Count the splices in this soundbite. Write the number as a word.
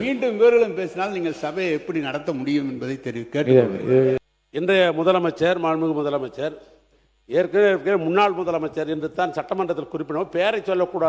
one